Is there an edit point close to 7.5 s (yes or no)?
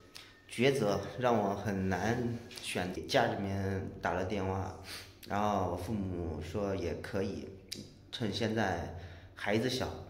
no